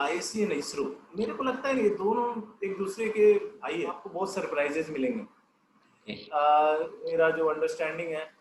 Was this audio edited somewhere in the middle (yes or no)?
yes